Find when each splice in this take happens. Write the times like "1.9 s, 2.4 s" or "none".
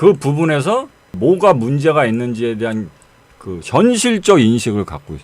1.2 s